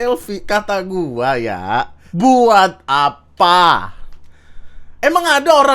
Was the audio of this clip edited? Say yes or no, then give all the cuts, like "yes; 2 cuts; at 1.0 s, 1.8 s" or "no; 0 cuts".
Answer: yes; 1 cut; at 2.0 s